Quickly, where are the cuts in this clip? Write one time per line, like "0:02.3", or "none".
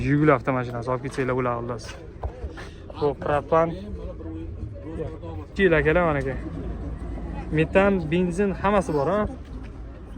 0:05.5